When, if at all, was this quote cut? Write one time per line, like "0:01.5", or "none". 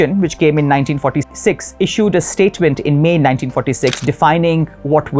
0:01.3